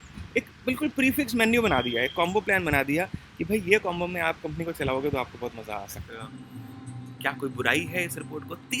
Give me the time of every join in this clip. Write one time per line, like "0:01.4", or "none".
0:06.4